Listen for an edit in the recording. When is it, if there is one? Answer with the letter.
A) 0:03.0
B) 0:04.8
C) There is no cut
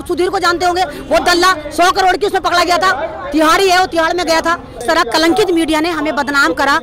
B